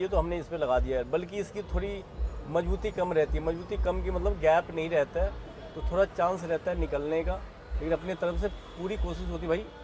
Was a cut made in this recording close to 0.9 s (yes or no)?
no